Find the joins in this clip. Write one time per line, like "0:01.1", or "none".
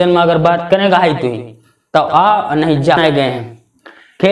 0:03.0

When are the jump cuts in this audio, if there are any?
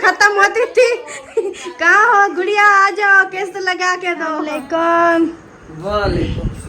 0:04.6

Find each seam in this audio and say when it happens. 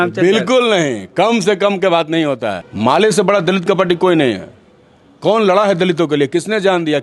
0:02.6

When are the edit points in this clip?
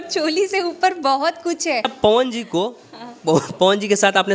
0:01.9

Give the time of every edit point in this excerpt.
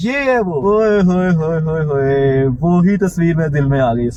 none

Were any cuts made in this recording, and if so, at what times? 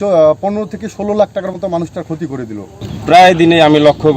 0:02.9

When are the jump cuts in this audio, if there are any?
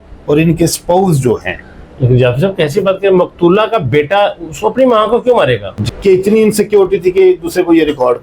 0:05.8

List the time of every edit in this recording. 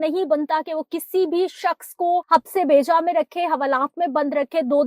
0:02.2

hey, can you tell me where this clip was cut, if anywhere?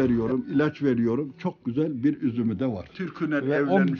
none

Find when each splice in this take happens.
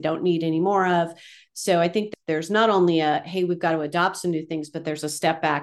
0:02.1

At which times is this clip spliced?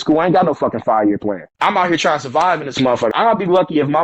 0:01.5
0:03.1

